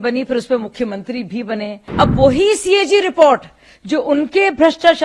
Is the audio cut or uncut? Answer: cut